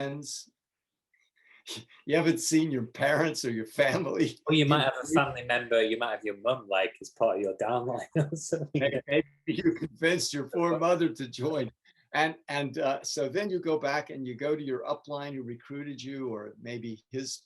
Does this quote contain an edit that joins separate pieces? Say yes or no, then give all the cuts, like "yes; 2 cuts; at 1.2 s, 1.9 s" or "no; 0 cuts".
no; 0 cuts